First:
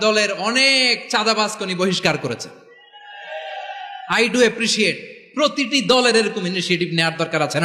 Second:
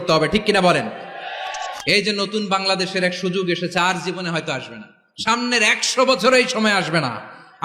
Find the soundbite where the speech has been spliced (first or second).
second